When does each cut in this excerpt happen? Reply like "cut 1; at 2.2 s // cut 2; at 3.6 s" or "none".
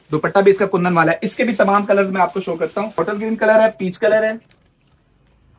cut 1; at 2.9 s